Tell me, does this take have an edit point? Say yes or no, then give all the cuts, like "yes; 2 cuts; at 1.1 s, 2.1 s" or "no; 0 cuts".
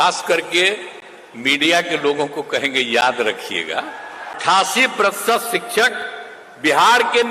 yes; 1 cut; at 4.3 s